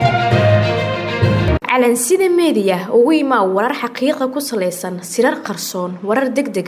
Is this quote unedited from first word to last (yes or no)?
no